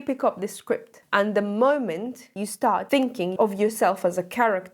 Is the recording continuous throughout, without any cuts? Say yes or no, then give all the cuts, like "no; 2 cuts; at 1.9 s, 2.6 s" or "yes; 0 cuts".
no; 2 cuts; at 0.9 s, 2.8 s